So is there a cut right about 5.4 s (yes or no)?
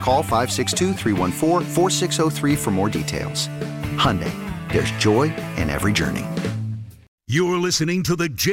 no